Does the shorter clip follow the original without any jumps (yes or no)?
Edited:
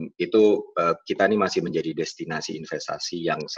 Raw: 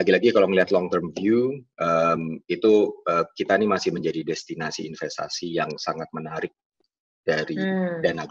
yes